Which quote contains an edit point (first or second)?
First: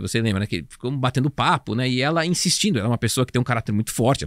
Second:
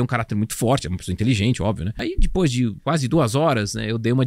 second